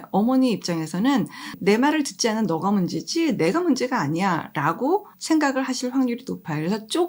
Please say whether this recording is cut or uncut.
uncut